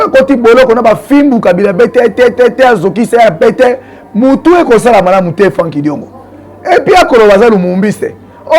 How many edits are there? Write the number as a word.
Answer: zero